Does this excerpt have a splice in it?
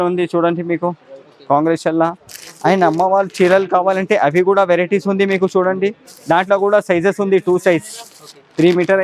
no; 0 cuts

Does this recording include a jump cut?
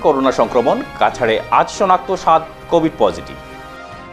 no; 0 cuts

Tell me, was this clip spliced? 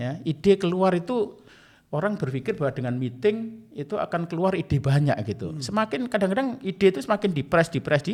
no; 0 cuts

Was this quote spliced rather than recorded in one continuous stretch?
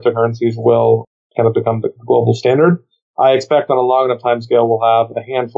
yes; 1 cut; at 1.2 s

